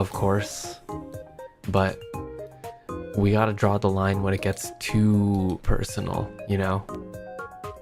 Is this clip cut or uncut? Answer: uncut